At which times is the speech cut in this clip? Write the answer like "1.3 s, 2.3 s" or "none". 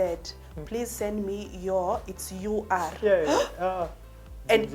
none